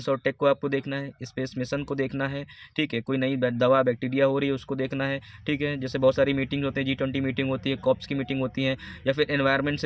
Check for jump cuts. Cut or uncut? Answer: uncut